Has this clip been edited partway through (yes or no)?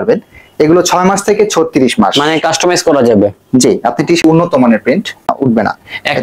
yes